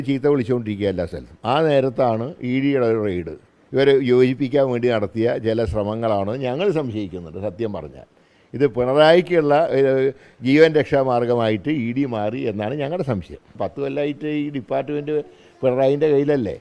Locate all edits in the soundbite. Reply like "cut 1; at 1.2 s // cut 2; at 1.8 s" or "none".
cut 1; at 13.5 s